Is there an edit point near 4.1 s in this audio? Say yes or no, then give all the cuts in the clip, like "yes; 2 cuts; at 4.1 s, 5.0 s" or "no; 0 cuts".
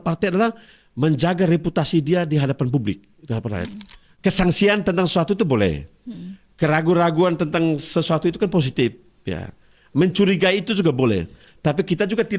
yes; 1 cut; at 4.1 s